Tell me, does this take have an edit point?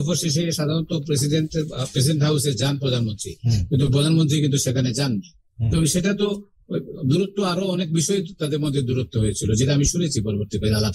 no; 0 cuts

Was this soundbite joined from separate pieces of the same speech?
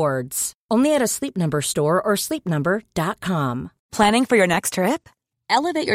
yes; 1 cut; at 3.8 s

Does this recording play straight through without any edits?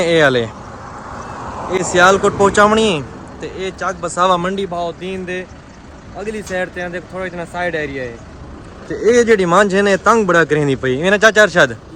yes; 0 cuts

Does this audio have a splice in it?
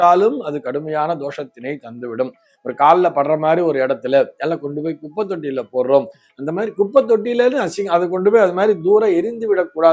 no; 0 cuts

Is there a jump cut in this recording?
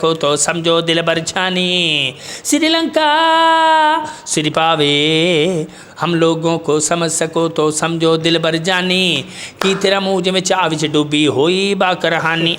no; 0 cuts

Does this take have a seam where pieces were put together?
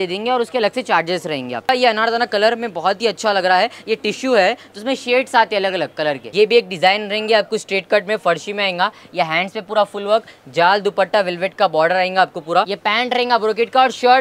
yes; 3 cuts; at 1.7 s, 6.2 s, 12.7 s

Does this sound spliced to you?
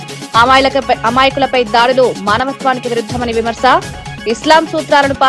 no; 0 cuts

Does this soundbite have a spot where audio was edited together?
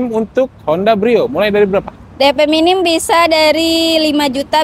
no; 0 cuts

